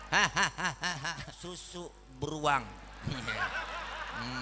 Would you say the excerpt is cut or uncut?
cut